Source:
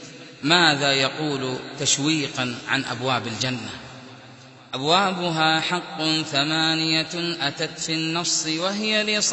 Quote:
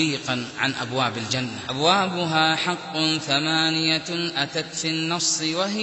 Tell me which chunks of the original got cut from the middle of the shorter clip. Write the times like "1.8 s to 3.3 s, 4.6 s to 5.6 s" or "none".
3.7 s to 4.7 s